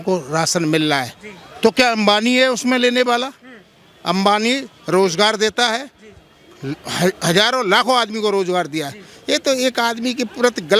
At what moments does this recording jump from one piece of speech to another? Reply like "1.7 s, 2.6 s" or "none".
none

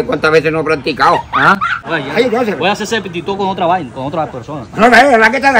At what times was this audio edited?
1.7 s

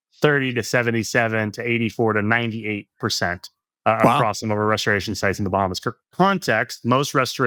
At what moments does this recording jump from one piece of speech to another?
none

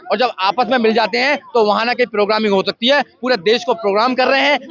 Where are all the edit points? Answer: none

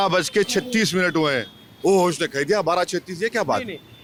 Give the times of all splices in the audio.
none

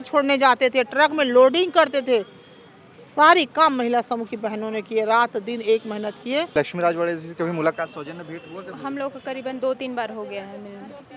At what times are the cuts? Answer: 6.5 s

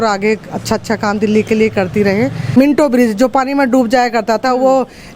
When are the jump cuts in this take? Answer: 2.5 s

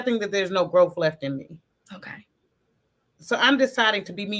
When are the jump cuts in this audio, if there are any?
none

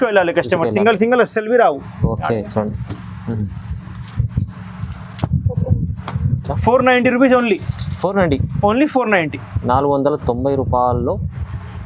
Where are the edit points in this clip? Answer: none

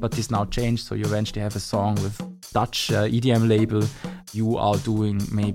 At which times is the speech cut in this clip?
2.3 s, 4.3 s

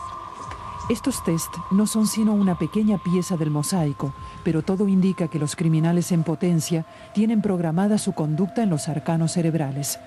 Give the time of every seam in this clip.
none

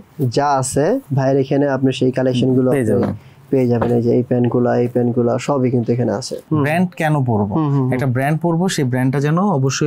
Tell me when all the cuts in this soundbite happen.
1.1 s, 6.4 s

